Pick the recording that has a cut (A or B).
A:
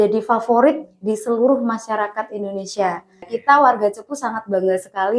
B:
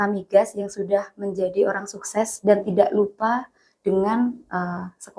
A